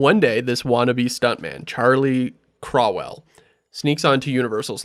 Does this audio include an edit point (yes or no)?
no